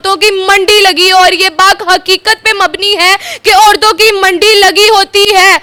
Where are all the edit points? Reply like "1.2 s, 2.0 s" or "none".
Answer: none